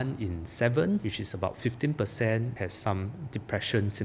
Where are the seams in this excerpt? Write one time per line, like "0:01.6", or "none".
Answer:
0:01.1
0:02.5